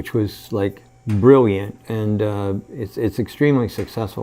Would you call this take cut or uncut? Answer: uncut